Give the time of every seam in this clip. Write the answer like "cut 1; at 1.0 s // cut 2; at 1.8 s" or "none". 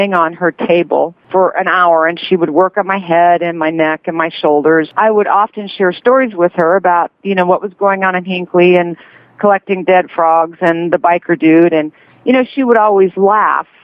cut 1; at 1.2 s